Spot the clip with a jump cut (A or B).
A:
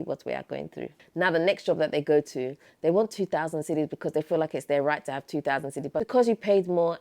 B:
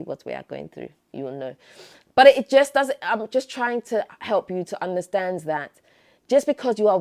A